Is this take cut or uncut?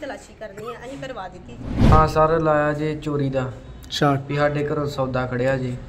cut